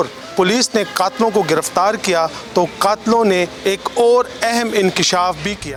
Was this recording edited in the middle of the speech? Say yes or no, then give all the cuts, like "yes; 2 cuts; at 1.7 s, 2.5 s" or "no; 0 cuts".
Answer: no; 0 cuts